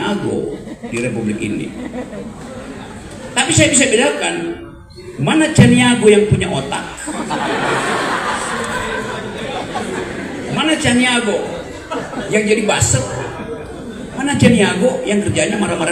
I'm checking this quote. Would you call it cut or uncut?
uncut